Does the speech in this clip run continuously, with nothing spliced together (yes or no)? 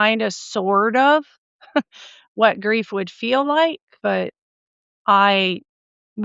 no